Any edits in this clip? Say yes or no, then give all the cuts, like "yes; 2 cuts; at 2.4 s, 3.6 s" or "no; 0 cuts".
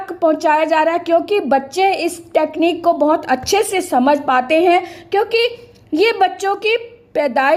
no; 0 cuts